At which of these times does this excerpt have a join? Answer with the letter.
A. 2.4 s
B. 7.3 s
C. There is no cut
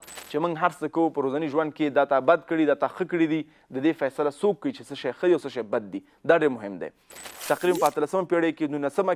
B